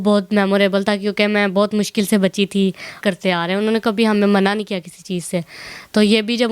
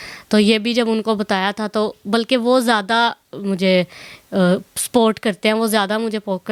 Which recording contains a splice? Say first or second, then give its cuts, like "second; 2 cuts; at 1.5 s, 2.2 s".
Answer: first; 1 cut; at 3.0 s